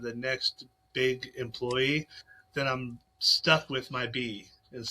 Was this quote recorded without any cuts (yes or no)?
yes